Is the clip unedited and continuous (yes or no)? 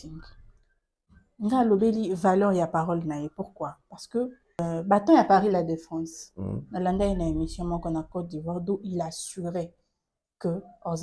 no